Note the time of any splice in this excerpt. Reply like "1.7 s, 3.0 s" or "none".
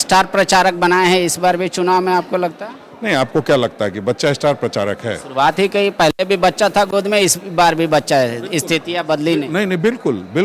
none